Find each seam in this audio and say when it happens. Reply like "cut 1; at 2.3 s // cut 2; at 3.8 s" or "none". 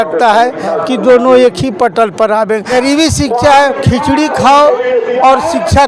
cut 1; at 2.8 s